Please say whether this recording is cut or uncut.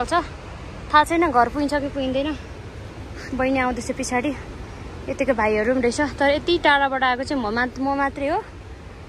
uncut